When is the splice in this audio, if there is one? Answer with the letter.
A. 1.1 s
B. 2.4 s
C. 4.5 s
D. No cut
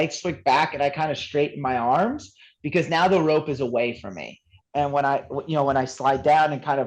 C